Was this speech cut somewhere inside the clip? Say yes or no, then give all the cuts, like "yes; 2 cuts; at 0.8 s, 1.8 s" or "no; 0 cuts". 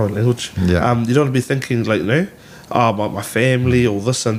no; 0 cuts